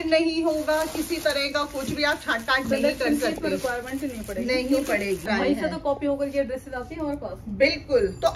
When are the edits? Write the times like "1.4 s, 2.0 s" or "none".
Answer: 5.3 s